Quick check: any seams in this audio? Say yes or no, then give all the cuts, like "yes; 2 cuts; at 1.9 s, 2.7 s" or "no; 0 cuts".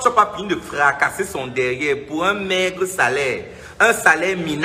no; 0 cuts